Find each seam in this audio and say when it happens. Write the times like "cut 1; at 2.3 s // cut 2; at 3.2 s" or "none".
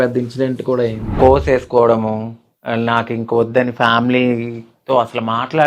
cut 1; at 1.0 s